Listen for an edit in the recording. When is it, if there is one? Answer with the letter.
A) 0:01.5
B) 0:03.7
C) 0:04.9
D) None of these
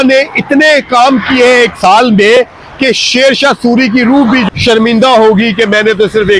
D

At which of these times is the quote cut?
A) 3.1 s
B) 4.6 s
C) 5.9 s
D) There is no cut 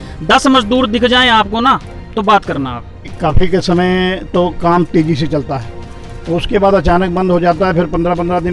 A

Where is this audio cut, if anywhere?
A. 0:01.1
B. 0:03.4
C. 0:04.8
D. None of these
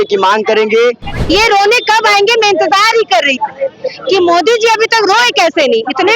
A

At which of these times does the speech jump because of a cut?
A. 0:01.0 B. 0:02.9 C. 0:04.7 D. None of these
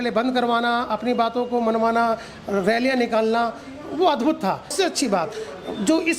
C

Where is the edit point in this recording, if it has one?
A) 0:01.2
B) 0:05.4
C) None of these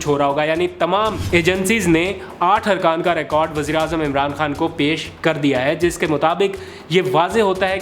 A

